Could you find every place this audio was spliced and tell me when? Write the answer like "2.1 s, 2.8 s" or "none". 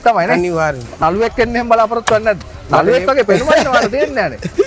1.0 s, 2.5 s